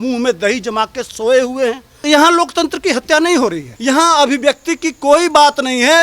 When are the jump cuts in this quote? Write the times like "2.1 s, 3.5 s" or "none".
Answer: 2.0 s, 3.7 s